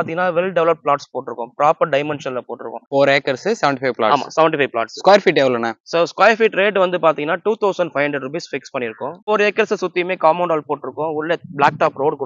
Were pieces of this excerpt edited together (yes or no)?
yes